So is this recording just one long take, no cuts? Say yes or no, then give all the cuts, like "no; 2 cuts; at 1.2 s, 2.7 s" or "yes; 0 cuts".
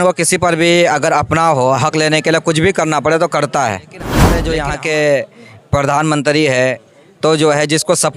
no; 1 cut; at 4.4 s